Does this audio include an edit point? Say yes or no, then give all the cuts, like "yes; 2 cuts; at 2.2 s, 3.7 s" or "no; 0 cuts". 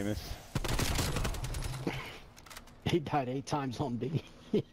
no; 0 cuts